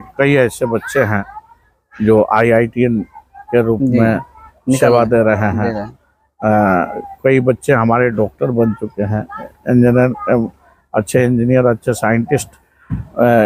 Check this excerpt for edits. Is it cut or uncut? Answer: uncut